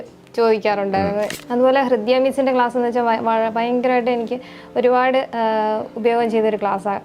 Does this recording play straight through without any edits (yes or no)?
no